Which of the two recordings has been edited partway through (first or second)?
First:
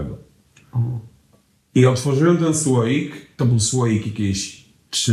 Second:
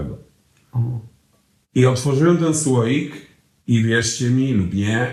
first